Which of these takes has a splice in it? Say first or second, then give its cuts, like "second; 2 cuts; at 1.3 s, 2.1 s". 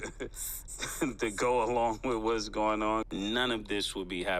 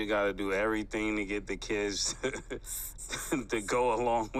first; 1 cut; at 3.2 s